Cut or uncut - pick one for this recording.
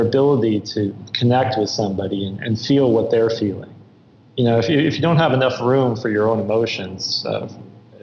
cut